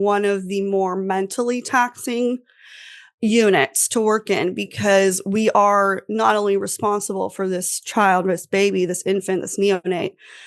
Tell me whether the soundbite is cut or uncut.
uncut